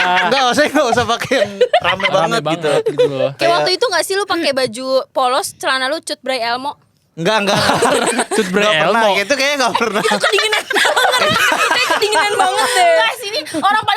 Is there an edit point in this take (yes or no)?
no